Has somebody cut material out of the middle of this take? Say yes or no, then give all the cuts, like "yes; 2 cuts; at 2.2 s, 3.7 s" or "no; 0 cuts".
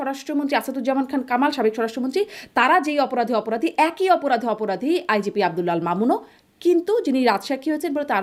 no; 0 cuts